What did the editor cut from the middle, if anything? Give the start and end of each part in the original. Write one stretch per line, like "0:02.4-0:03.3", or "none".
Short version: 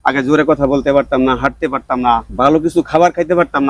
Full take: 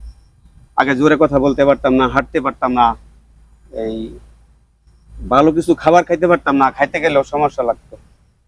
0:03.0-0:05.2